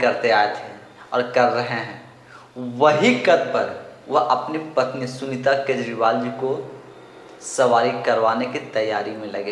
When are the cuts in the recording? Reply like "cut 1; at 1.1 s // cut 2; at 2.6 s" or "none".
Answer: none